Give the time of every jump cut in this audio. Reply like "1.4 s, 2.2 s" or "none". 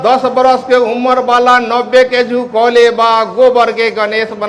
none